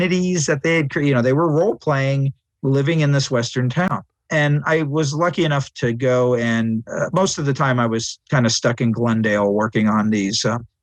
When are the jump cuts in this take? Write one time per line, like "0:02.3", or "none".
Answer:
none